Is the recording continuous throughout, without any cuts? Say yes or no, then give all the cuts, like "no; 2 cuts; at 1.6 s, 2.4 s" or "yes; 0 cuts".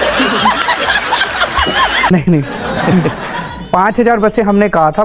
yes; 0 cuts